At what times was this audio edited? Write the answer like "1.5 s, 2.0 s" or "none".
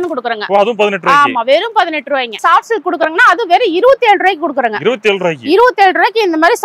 2.4 s